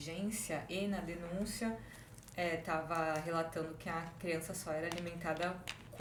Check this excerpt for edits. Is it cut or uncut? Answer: uncut